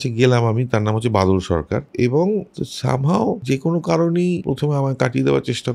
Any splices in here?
yes; 4 cuts; at 1.9 s, 2.6 s, 3.4 s, 4.4 s

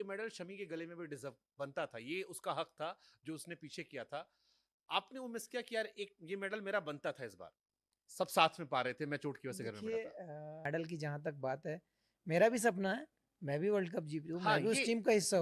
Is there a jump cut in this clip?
no; 0 cuts

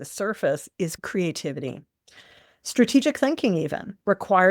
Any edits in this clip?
yes; 1 cut; at 1.0 s

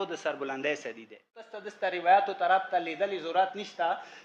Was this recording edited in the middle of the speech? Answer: yes; 1 cut; at 1.6 s

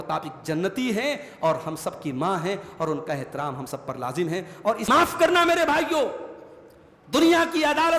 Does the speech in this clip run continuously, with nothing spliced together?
no; 1 cut; at 4.9 s

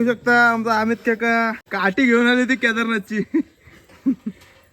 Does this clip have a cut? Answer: yes; 1 cut; at 1.6 s

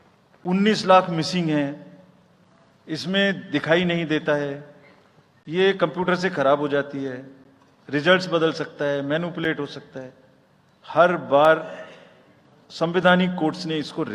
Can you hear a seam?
no; 0 cuts

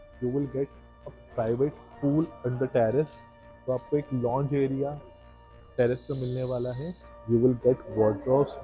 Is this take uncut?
no; 1 cut; at 7.2 s

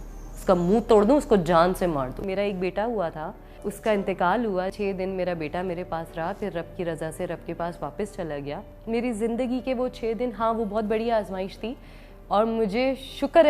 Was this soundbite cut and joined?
yes; 4 cuts; at 2.2 s, 3.6 s, 4.7 s, 8.7 s

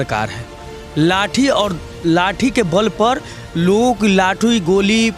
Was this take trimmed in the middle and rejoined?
no; 0 cuts

